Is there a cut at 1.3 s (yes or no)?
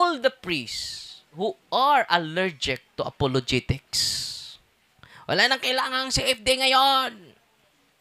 yes